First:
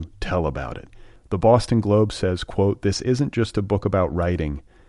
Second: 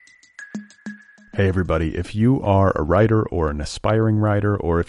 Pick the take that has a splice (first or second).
second